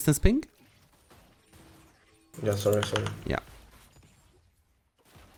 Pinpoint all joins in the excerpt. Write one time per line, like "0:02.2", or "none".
none